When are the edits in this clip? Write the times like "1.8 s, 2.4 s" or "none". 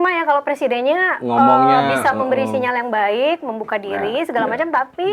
none